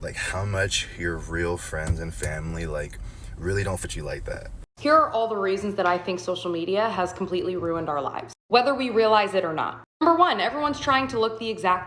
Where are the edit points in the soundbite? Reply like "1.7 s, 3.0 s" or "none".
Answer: 4.5 s